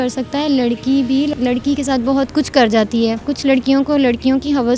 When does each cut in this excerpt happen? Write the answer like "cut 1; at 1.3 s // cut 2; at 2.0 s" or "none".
cut 1; at 1.3 s // cut 2; at 3.3 s